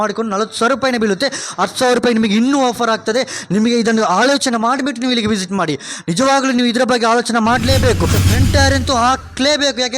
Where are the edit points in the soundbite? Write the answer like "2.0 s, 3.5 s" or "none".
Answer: 8.2 s